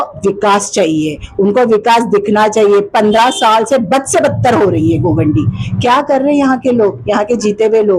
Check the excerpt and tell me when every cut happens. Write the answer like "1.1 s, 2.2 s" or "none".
none